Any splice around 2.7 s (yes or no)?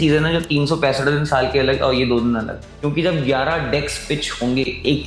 yes